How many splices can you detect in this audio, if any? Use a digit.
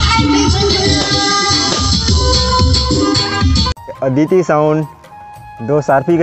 1